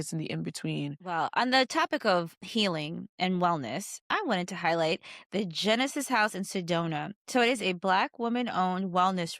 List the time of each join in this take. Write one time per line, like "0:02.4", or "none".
0:01.1
0:02.4
0:03.9